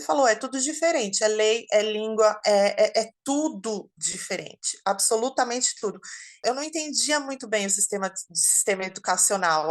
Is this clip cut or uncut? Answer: cut